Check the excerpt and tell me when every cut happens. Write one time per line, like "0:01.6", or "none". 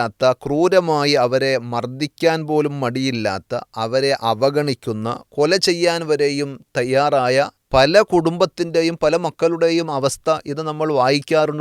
0:07.6